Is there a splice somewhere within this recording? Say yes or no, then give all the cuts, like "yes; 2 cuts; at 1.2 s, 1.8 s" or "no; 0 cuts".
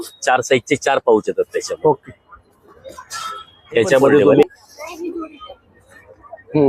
yes; 1 cut; at 4.4 s